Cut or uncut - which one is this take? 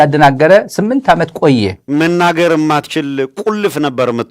cut